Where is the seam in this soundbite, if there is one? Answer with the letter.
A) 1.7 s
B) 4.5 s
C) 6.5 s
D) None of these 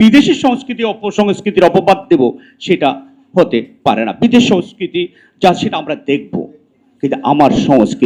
D